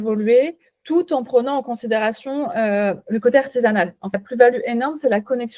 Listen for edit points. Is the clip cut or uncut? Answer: cut